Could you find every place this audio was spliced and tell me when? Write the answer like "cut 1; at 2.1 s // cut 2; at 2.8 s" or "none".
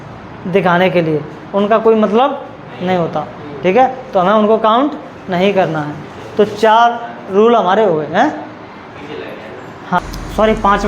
none